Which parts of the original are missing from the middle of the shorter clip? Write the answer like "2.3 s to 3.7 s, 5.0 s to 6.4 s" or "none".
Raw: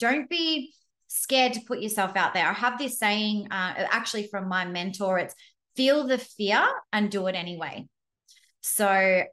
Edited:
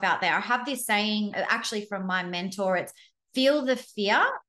3.5 s to 3.7 s